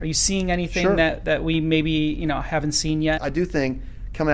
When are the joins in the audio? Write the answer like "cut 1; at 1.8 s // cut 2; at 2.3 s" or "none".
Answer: cut 1; at 3.2 s